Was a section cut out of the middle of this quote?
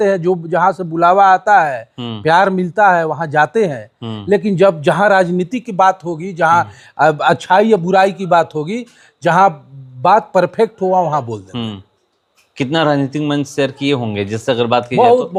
no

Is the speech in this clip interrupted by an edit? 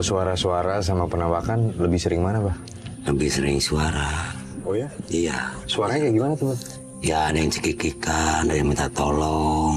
no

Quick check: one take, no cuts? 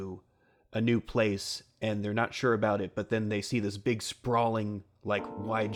yes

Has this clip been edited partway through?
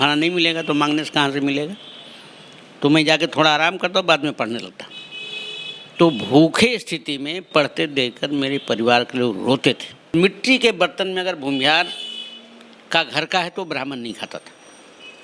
yes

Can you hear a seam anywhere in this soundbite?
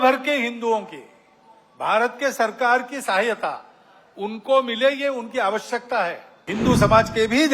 yes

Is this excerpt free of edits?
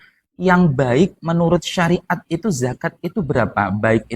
yes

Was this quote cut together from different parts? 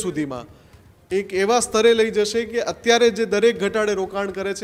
no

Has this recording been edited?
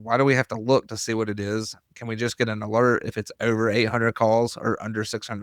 no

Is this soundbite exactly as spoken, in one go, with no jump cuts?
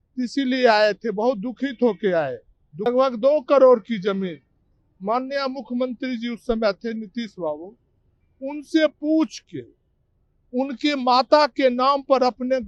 no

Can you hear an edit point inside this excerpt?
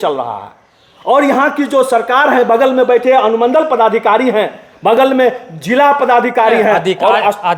no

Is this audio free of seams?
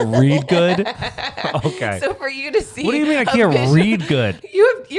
yes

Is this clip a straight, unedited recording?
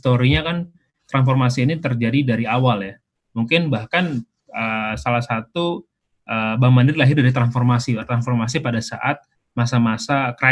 yes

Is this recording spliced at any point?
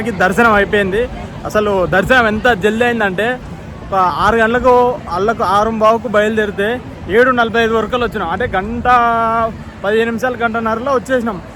no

